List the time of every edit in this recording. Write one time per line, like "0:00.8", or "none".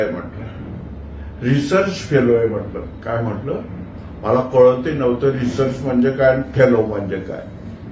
none